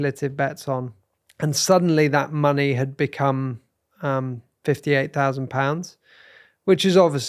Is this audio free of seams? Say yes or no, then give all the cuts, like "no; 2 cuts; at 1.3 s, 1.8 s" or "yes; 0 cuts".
no; 1 cut; at 1.0 s